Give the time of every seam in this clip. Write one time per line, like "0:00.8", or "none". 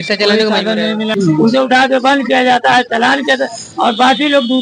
0:01.1